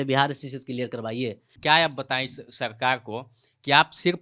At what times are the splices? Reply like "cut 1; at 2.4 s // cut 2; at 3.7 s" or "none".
cut 1; at 1.5 s

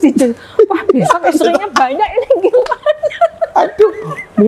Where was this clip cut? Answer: none

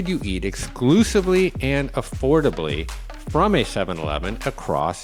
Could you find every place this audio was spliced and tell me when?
none

